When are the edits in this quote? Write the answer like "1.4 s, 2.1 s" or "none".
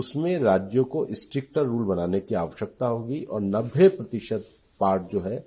none